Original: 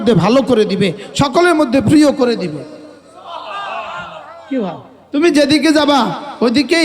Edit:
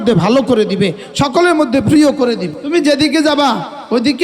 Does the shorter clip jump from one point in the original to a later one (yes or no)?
yes